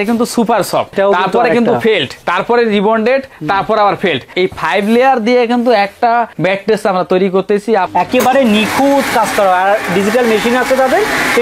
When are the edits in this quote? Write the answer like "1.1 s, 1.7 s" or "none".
0.9 s, 2.2 s, 4.3 s, 6.3 s, 7.9 s